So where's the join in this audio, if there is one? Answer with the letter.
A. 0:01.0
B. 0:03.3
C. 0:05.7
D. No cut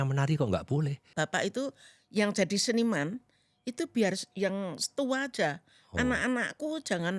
A